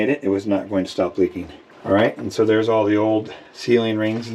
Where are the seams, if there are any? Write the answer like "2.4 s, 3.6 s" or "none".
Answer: none